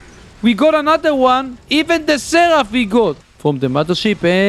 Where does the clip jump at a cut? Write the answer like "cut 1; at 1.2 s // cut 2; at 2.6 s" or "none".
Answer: cut 1; at 3.3 s